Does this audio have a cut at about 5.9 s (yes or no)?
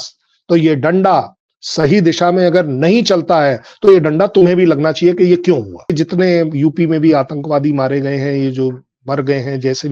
yes